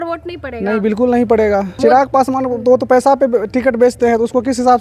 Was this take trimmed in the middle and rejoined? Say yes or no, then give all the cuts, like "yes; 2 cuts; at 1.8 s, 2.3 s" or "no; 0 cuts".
yes; 1 cut; at 1.7 s